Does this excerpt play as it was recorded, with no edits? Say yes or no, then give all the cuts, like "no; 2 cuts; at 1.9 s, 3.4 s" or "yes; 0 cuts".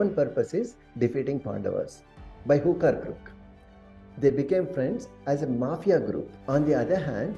no; 1 cut; at 6.3 s